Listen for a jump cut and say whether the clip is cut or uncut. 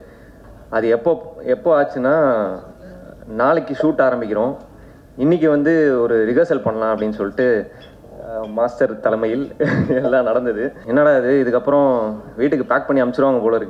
cut